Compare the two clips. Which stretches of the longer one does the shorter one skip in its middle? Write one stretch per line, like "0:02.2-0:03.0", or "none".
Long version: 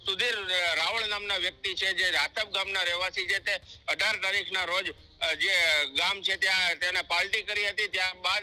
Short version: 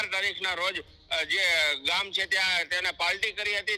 none